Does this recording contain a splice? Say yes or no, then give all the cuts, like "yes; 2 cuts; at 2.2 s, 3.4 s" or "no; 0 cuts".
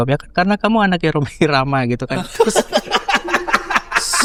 no; 0 cuts